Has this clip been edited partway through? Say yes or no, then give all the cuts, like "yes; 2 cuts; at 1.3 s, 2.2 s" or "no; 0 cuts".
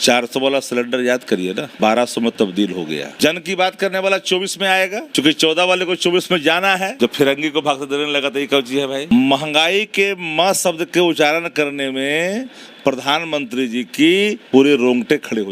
yes; 6 cuts; at 1.7 s, 3.2 s, 5.0 s, 6.9 s, 9.1 s, 14.4 s